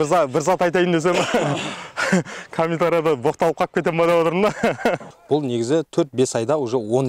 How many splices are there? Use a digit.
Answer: 1